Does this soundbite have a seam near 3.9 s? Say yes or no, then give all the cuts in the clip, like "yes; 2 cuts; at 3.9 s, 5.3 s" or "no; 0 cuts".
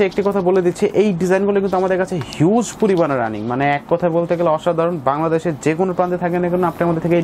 no; 0 cuts